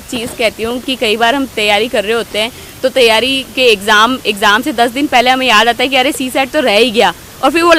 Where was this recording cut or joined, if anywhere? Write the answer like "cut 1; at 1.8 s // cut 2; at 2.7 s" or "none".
none